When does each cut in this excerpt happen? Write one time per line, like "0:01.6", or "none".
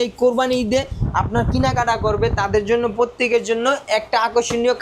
none